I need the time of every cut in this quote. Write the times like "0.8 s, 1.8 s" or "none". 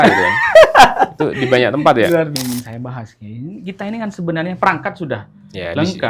2.3 s